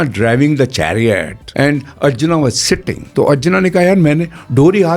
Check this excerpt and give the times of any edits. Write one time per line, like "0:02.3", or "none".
0:01.4
0:03.0